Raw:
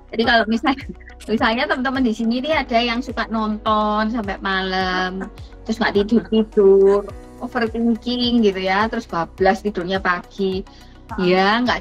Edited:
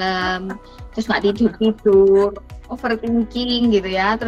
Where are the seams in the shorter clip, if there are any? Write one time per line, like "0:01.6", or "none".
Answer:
none